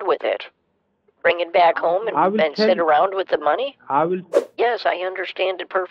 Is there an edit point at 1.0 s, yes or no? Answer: no